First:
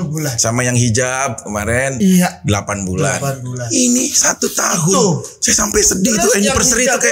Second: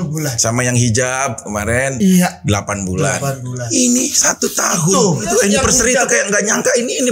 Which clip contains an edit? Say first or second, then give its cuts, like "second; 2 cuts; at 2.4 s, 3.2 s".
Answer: second; 1 cut; at 5.2 s